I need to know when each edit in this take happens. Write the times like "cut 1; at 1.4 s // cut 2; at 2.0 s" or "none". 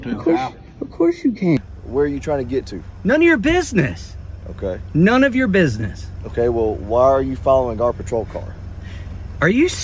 cut 1; at 1.6 s